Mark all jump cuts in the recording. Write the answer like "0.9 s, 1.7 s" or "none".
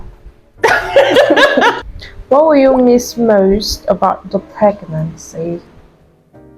1.8 s